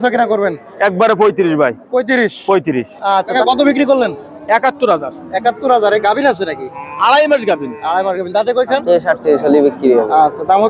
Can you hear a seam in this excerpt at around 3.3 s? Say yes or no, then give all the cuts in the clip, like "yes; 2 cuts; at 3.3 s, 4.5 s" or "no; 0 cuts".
yes; 2 cuts; at 3.3 s, 8.8 s